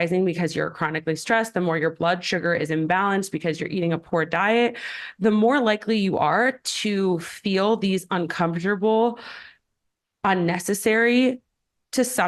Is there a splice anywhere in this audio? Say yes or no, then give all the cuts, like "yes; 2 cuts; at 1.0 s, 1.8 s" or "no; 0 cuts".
no; 0 cuts